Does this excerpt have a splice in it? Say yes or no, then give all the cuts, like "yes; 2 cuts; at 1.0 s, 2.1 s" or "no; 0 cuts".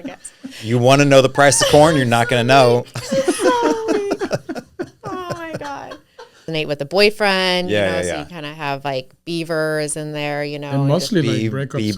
yes; 1 cut; at 6.5 s